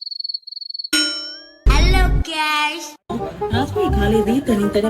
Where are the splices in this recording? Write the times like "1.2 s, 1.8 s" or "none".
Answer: 3.1 s